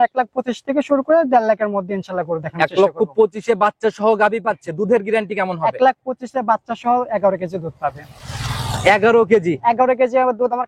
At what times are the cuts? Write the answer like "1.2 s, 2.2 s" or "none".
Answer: none